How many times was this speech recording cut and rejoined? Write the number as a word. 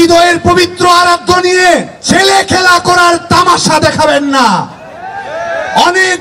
one